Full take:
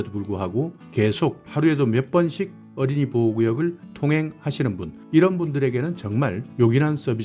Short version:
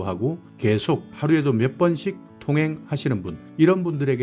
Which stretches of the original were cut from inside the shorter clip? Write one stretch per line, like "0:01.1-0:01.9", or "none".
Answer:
0:02.6-0:03.9

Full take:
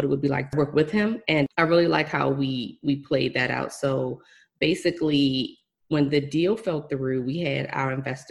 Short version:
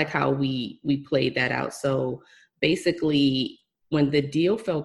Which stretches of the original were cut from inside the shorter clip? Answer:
none

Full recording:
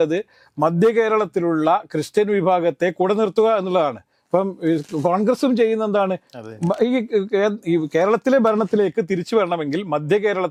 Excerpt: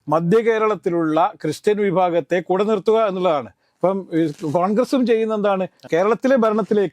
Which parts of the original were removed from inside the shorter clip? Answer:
0:06.4-0:07.9

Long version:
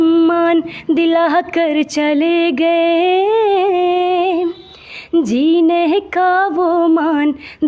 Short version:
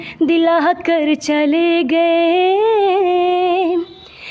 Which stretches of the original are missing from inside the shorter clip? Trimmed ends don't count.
none

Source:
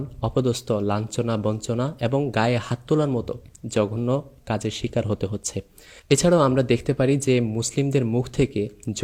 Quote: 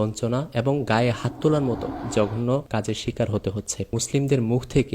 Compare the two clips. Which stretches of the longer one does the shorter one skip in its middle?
0:03.4-0:03.5
0:04.3-0:04.4
0:05.7-0:07.6

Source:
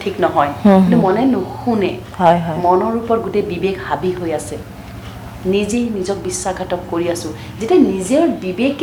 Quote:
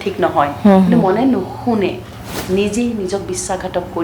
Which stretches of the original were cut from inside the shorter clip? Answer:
0:02.0-0:05.0

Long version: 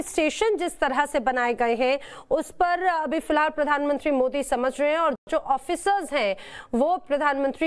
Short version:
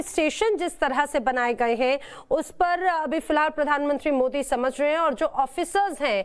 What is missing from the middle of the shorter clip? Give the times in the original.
0:05.2-0:05.3

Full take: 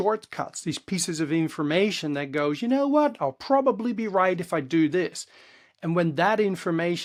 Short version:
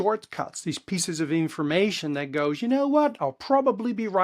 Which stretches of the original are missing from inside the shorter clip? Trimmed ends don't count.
none

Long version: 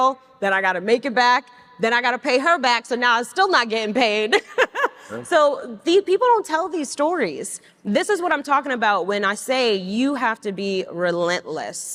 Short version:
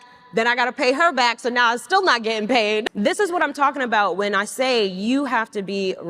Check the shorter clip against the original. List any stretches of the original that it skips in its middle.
0:04.3-0:07.7

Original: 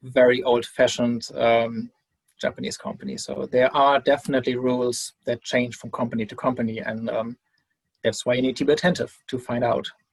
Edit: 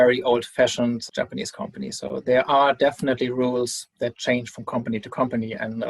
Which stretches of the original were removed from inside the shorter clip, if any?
0:01.3-0:02.3

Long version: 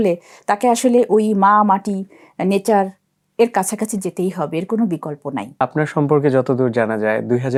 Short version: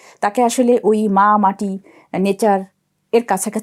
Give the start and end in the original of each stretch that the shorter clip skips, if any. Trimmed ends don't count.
none

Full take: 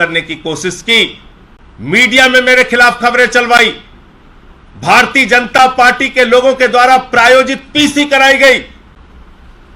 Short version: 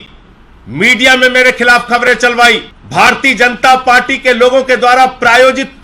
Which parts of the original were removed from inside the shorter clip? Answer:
0:03.9-0:04.7

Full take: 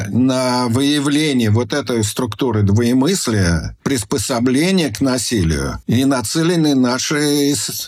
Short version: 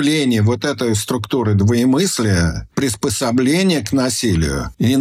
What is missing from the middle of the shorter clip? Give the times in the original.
none

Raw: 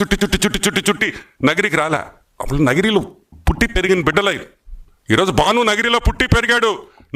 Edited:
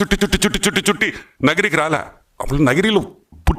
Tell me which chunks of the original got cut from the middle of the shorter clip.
none

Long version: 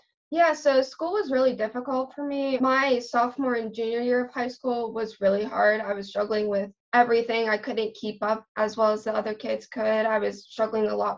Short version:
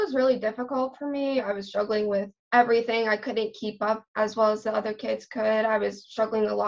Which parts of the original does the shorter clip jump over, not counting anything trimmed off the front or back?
0:02.6-0:05.8

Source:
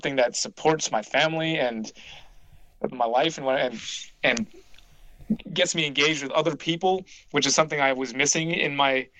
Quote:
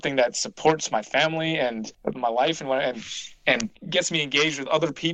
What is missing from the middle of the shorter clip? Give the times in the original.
0:01.9-0:02.7
0:04.6-0:05.5

